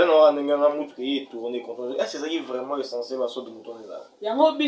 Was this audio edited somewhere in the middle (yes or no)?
no